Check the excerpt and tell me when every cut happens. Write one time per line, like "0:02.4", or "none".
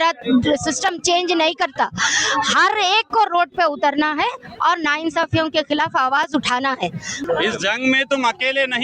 0:07.1